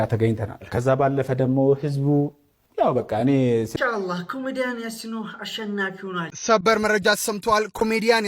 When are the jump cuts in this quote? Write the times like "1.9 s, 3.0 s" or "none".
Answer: 3.7 s, 6.3 s